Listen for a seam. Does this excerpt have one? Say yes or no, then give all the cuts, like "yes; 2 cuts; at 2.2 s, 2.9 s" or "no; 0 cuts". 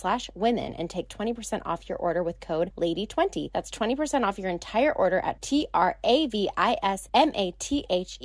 yes; 3 cuts; at 2.7 s, 3.5 s, 7.0 s